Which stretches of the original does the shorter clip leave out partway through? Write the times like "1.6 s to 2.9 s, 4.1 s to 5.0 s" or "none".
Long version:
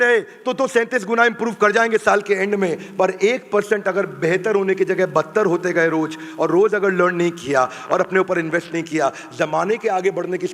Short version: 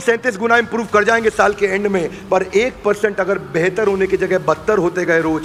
none

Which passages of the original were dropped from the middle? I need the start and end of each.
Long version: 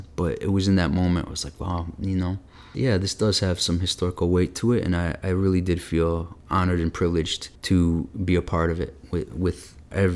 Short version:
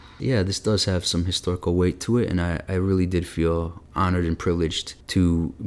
none

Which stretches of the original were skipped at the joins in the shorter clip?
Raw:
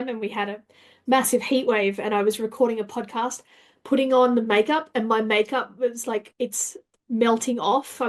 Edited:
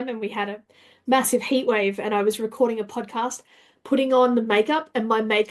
none

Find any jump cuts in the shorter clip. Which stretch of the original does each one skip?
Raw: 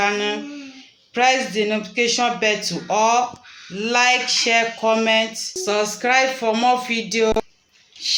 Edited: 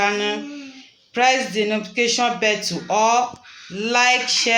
none

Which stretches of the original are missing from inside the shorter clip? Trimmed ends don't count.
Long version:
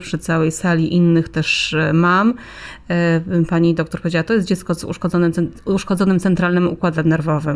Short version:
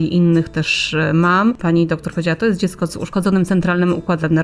2.4 s to 3.5 s, 5.0 s to 5.8 s

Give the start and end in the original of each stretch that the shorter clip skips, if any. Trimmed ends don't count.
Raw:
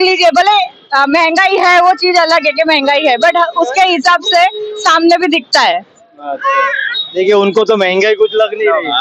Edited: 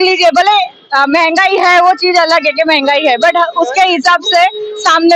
none

